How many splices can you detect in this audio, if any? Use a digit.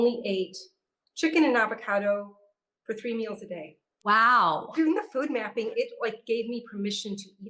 2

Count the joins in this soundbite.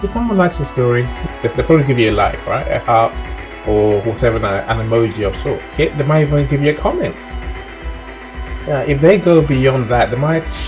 2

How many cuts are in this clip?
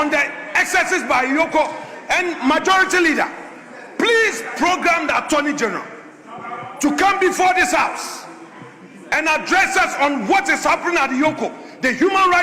0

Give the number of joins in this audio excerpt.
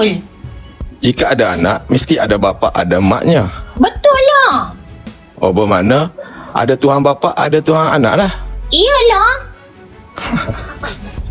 0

